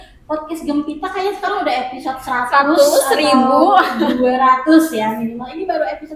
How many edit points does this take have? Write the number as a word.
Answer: zero